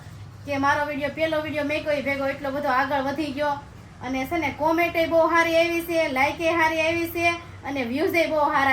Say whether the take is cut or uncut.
uncut